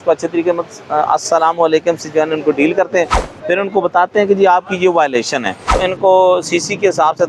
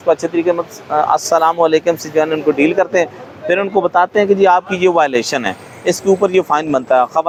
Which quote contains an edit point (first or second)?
first